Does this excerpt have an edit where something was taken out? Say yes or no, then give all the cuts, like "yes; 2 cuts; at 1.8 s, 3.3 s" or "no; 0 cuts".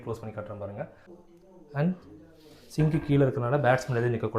yes; 1 cut; at 1.2 s